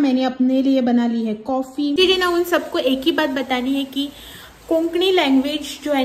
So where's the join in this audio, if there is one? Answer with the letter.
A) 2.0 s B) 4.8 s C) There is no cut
A